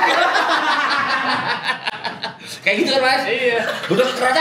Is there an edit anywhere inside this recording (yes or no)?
no